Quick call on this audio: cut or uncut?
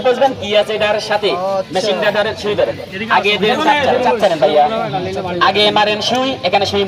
cut